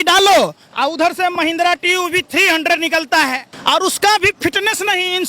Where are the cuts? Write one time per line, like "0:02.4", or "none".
0:03.5